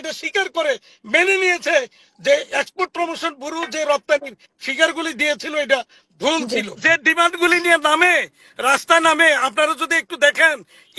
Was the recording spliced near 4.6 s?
no; 1 cut; at 6.8 s

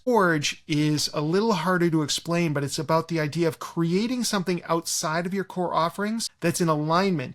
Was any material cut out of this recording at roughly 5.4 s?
no; 0 cuts

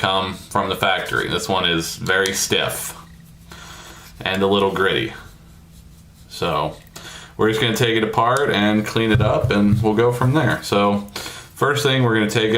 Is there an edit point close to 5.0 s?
no; 1 cut; at 1.1 s

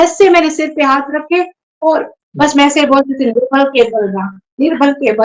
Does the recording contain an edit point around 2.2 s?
yes; 1 cut; at 2.2 s

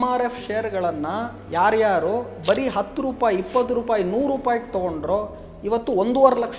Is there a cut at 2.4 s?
no; 0 cuts

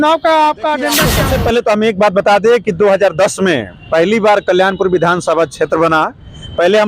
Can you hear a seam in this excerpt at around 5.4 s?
no; 1 cut; at 1.2 s

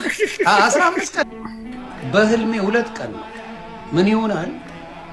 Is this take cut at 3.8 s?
no; 1 cut; at 1.2 s

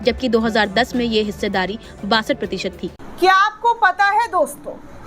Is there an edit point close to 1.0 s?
no; 1 cut; at 3.0 s

